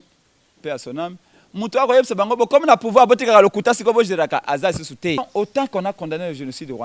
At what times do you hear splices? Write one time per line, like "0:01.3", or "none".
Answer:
0:05.2